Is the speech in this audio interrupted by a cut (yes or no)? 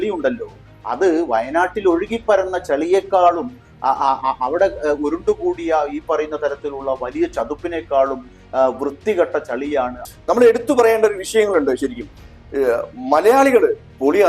yes